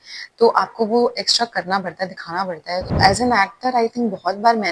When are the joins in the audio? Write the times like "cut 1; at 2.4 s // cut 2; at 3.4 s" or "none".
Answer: cut 1; at 2.8 s